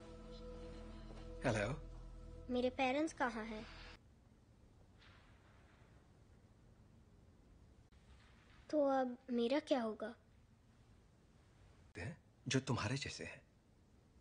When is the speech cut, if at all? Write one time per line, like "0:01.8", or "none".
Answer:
0:04.0